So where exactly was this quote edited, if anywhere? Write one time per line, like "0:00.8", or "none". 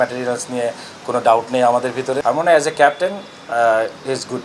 0:02.2